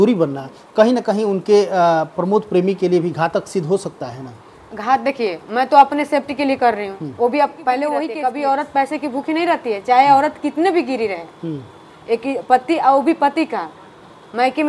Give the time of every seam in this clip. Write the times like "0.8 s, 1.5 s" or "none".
8.1 s